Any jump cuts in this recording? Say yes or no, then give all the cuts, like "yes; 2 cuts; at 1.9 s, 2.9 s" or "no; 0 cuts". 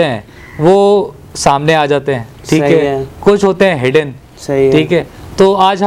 no; 0 cuts